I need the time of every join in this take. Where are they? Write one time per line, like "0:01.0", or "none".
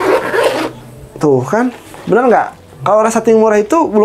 none